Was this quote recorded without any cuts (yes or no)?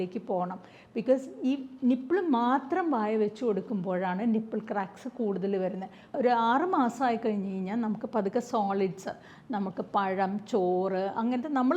no